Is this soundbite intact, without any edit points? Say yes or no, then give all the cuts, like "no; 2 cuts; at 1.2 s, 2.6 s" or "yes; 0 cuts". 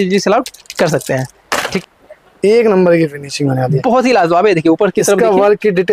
no; 1 cut; at 1.8 s